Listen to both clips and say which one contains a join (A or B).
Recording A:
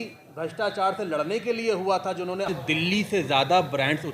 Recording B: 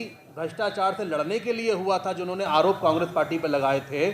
A